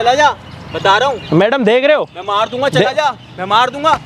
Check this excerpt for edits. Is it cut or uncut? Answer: uncut